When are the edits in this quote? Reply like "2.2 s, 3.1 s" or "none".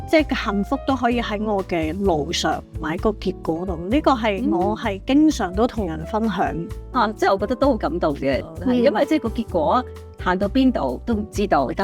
6.8 s, 8.4 s